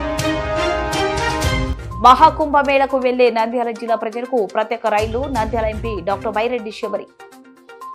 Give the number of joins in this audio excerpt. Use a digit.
0